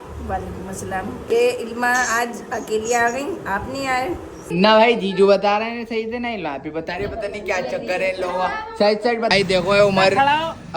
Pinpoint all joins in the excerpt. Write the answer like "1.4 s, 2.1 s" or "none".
1.3 s, 4.5 s, 9.3 s